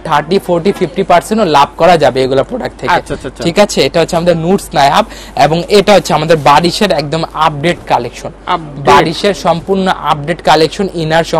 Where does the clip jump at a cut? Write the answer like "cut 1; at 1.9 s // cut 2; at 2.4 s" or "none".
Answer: none